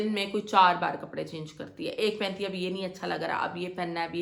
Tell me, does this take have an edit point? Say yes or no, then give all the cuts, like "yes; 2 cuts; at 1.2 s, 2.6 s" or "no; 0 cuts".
no; 0 cuts